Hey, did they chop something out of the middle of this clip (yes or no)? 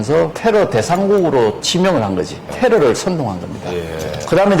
no